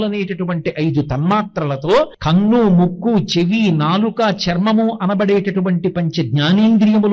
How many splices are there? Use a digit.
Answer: 1